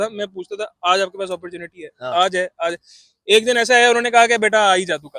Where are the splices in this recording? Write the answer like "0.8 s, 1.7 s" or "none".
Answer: none